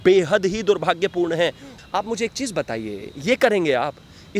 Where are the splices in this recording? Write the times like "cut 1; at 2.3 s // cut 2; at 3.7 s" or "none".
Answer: cut 1; at 1.7 s